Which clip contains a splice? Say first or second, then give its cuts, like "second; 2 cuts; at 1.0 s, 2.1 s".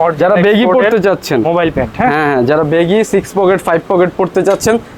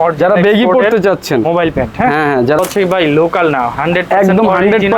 second; 1 cut; at 2.6 s